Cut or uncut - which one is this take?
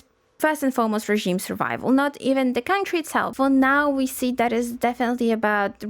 cut